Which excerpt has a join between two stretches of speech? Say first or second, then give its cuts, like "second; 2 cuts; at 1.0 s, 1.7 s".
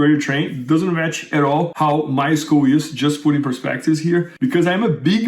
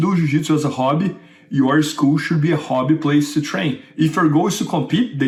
first; 2 cuts; at 1.7 s, 4.3 s